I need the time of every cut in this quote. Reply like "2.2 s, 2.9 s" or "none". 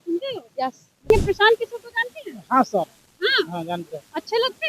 1.1 s